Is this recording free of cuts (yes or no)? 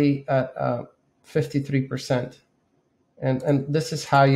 yes